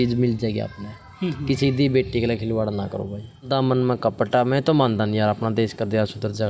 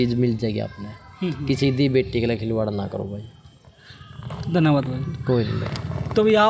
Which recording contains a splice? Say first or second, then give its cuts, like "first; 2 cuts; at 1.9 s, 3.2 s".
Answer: first; 1 cut; at 3.5 s